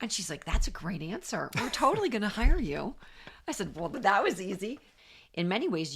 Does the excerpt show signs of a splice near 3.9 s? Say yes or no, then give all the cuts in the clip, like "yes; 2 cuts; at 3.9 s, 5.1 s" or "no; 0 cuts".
yes; 2 cuts; at 3.9 s, 4.9 s